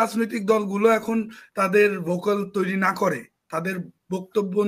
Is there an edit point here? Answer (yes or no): no